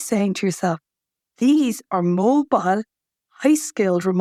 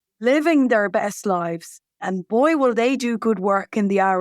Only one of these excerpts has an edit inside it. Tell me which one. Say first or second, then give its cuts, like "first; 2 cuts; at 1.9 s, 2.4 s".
second; 1 cut; at 2.1 s